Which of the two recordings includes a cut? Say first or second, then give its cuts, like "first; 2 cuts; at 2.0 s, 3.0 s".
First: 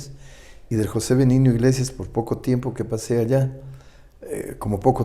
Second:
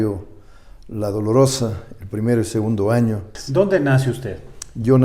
second; 1 cut; at 3.3 s